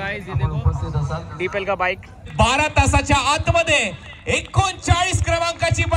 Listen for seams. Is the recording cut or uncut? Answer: cut